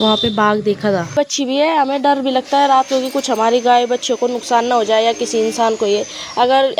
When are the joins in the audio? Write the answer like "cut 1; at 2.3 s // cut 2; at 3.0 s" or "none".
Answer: cut 1; at 1.1 s